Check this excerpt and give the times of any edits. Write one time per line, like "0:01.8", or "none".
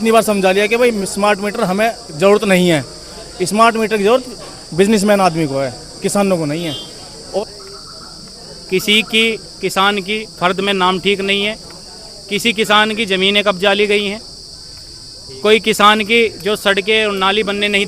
0:07.4